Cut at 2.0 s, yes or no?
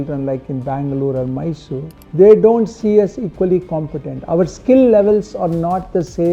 yes